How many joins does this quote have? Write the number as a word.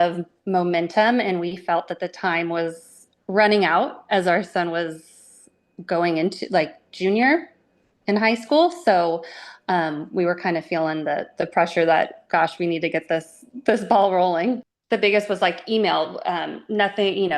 one